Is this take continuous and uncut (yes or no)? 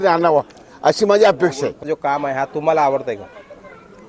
no